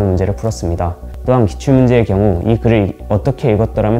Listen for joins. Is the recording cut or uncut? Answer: cut